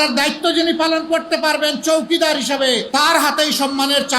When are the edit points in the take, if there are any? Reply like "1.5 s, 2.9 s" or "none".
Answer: 2.8 s